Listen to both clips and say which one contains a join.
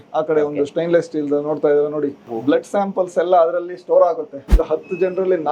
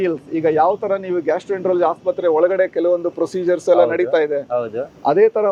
first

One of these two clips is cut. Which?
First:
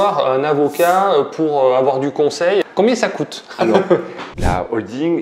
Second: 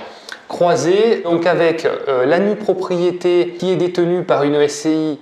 first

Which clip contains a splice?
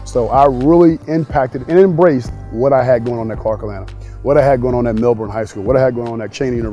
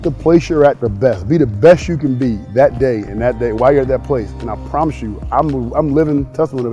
first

